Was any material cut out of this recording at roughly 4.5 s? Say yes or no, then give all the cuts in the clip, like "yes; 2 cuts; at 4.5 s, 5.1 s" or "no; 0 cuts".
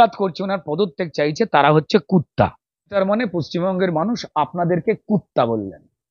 no; 1 cut; at 2.9 s